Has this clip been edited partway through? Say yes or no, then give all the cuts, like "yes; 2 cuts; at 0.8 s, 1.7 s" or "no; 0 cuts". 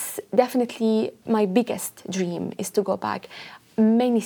yes; 1 cut; at 1.2 s